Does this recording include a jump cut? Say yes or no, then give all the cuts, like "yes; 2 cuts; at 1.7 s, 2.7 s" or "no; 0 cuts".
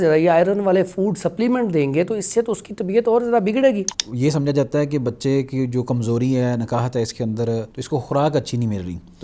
yes; 2 cuts; at 4.0 s, 7.8 s